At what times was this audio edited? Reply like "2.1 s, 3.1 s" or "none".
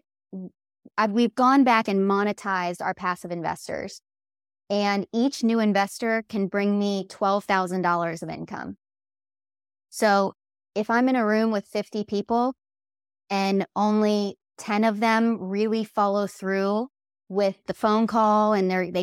17.7 s